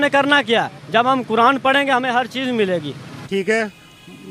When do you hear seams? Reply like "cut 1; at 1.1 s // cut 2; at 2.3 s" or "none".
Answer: cut 1; at 3.4 s